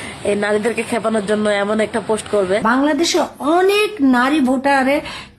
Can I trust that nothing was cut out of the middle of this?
no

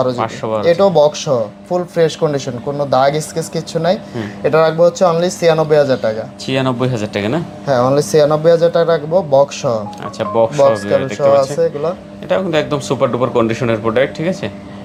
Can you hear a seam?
no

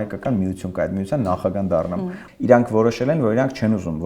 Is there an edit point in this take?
yes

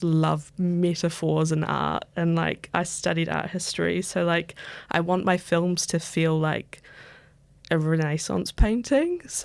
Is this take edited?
no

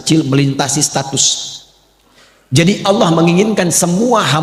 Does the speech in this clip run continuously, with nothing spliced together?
yes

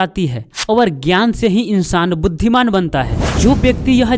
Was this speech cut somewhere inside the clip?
yes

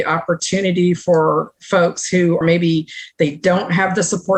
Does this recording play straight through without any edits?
yes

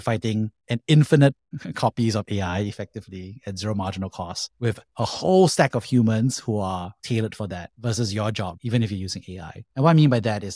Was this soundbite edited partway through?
no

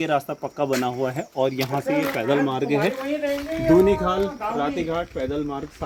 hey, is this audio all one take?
yes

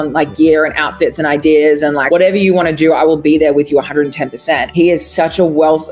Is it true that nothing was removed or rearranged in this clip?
no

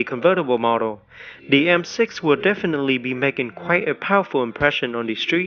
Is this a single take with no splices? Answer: no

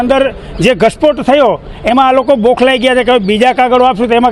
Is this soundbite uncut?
yes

